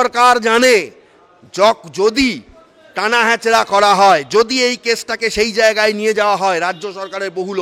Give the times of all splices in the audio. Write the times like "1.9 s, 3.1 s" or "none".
none